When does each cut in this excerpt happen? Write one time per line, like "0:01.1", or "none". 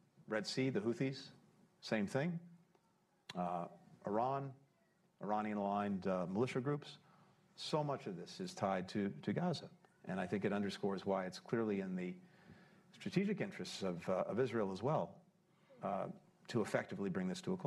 none